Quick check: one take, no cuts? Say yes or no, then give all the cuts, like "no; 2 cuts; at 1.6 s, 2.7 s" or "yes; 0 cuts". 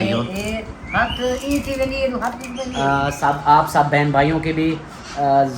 no; 1 cut; at 2.7 s